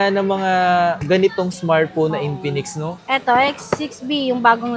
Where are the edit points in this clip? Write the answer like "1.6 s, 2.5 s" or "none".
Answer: 3.0 s